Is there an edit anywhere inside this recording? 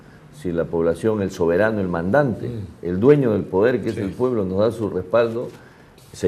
no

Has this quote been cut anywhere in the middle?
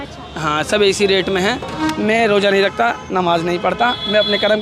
yes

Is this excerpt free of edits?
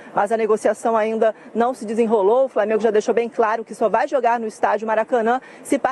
yes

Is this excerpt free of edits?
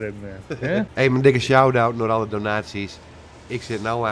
no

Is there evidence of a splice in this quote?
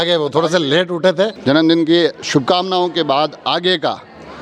yes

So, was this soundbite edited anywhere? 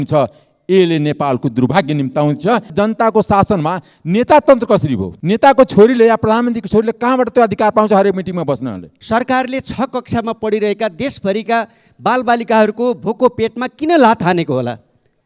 yes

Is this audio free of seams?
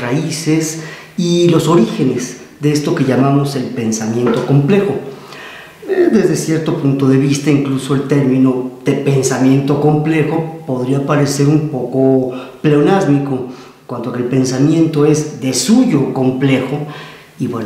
no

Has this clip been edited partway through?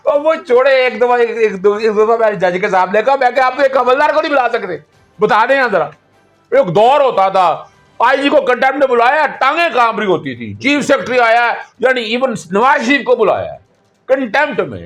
no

